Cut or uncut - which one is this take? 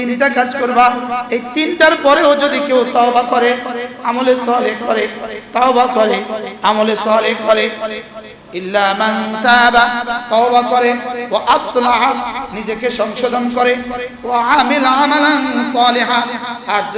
uncut